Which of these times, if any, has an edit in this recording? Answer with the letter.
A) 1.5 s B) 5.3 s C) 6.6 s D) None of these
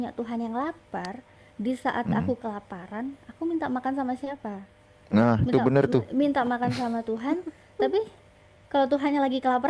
D